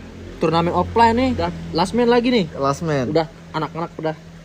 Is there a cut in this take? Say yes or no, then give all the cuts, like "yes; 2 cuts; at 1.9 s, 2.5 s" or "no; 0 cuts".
yes; 1 cut; at 1.4 s